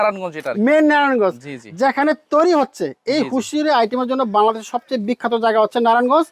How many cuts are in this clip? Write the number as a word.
zero